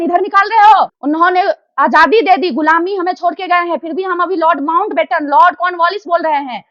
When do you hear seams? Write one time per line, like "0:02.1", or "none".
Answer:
0:01.0